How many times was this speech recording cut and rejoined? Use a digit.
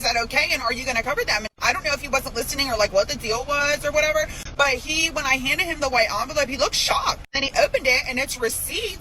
3